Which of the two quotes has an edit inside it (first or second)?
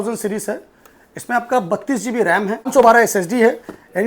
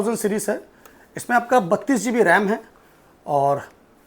first